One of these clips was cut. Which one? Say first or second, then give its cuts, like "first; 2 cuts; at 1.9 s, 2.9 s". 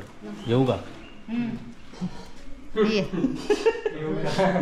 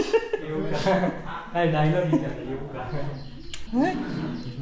second; 1 cut; at 3.5 s